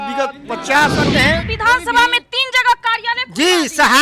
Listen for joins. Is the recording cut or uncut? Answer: cut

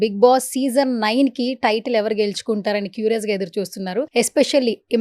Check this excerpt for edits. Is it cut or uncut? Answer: cut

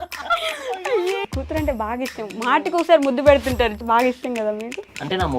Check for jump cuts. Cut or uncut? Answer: cut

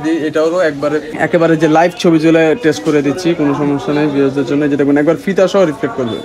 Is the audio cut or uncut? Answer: cut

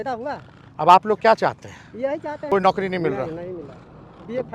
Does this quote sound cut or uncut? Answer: cut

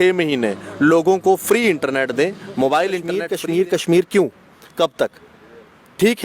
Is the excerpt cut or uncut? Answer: cut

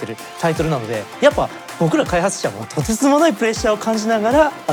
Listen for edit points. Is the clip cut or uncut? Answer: uncut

